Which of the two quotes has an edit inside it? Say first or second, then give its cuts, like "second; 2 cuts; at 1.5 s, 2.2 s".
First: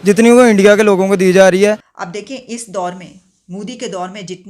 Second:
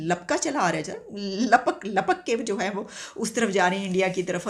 first; 1 cut; at 1.9 s